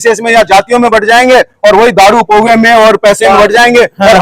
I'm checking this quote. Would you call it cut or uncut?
uncut